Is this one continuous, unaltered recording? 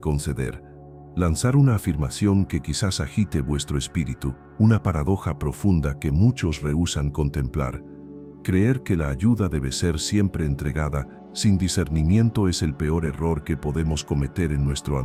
yes; 0 cuts

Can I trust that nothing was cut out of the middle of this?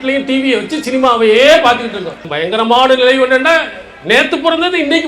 no; 1 cut; at 2.2 s

